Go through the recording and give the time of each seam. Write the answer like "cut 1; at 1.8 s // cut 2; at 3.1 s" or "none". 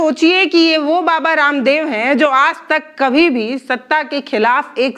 none